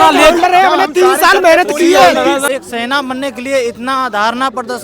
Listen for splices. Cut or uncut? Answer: cut